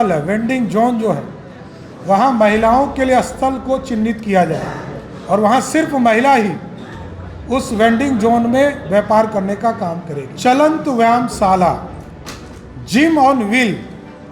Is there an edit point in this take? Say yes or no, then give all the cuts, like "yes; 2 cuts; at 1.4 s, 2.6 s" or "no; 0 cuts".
yes; 1 cut; at 10.2 s